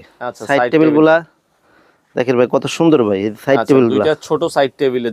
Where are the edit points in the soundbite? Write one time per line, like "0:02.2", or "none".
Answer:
none